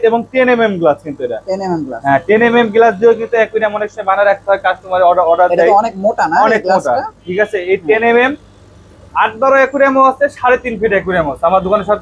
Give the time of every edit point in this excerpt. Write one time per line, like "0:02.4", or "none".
none